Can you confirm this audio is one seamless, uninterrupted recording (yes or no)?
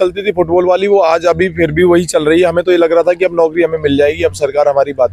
yes